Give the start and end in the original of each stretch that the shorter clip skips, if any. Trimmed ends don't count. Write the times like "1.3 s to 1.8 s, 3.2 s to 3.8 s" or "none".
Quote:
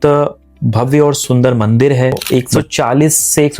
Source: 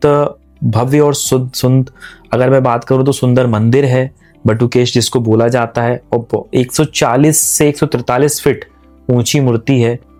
1.2 s to 3.2 s, 4.1 s to 6.4 s